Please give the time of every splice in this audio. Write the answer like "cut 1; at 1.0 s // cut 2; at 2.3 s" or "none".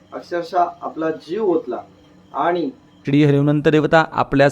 cut 1; at 3.0 s